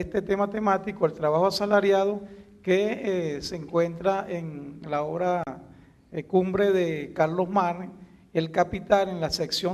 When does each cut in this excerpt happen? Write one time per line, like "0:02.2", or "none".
0:08.2